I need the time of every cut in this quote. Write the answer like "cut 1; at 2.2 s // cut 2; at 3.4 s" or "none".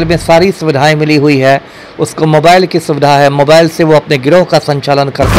none